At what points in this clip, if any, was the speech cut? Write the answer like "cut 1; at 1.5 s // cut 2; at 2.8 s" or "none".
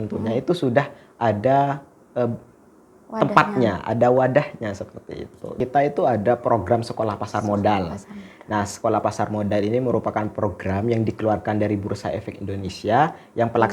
cut 1; at 5.6 s